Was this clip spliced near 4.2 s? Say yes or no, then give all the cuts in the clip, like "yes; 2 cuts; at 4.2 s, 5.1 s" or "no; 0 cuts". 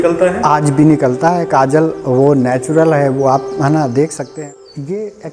yes; 1 cut; at 4.2 s